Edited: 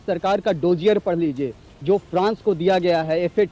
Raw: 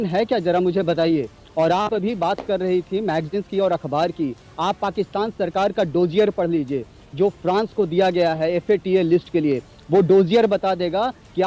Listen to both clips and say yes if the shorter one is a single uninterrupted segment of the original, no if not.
yes